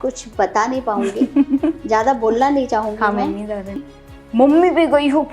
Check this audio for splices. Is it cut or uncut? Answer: cut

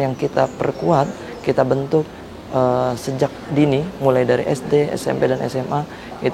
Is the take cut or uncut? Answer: uncut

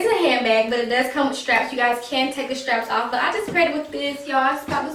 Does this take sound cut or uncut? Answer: uncut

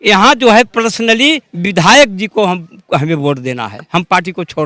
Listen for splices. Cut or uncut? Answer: uncut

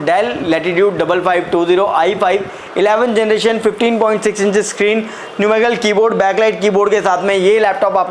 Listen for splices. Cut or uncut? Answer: uncut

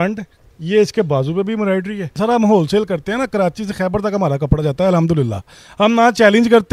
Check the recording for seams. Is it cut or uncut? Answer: cut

